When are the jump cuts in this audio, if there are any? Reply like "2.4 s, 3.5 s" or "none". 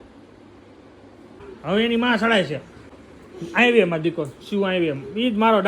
1.5 s, 2.9 s